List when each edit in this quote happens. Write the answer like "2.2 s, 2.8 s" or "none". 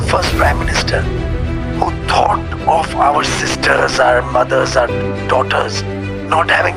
none

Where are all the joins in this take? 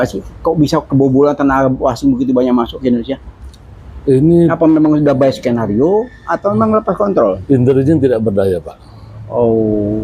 none

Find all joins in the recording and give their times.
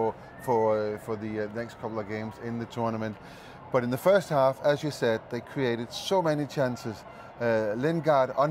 none

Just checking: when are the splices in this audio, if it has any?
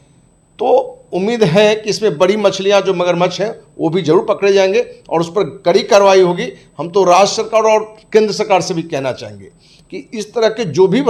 none

